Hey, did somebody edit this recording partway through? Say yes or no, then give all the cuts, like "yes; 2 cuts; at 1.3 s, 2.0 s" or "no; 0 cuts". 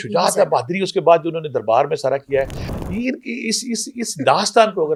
no; 0 cuts